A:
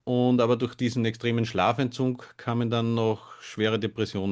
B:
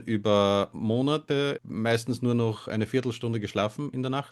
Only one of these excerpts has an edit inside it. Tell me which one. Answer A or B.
B